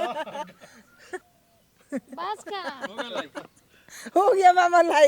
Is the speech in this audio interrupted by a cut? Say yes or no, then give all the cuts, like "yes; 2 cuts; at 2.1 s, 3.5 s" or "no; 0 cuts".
yes; 1 cut; at 1.2 s